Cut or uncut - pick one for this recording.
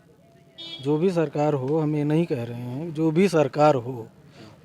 uncut